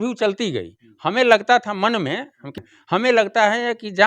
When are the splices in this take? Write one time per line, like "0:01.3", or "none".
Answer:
0:02.6